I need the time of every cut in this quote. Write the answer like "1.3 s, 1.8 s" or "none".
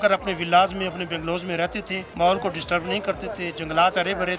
2.0 s

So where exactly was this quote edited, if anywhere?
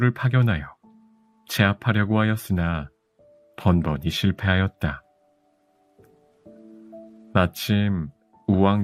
none

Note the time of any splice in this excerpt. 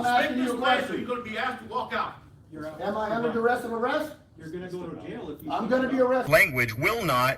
6.3 s

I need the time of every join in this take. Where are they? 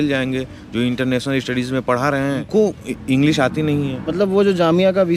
2.4 s, 4.1 s

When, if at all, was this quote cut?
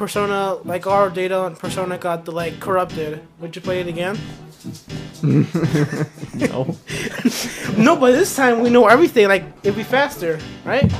4.0 s

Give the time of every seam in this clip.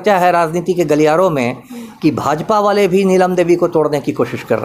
none

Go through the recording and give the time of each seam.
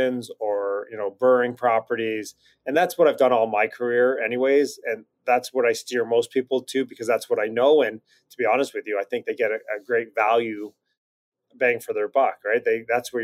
none

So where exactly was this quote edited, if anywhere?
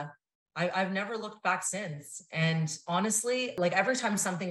3.5 s

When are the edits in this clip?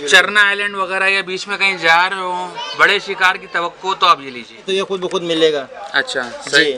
4.7 s

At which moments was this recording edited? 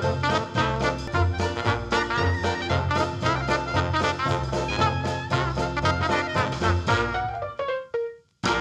none

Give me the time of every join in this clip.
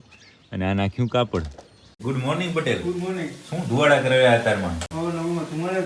2.0 s

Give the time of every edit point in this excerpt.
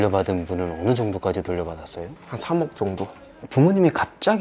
3.2 s

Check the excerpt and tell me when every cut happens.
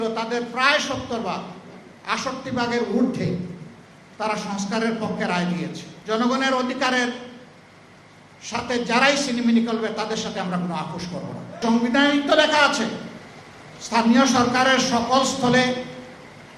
5.9 s, 11.6 s

